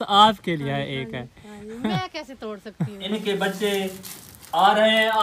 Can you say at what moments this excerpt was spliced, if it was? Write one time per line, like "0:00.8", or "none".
0:03.0